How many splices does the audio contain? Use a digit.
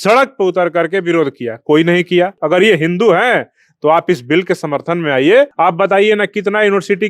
2